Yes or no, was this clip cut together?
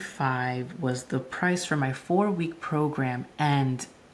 no